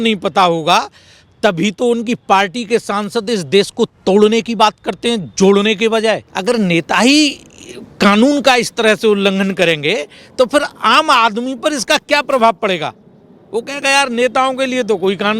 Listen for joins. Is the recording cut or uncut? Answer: cut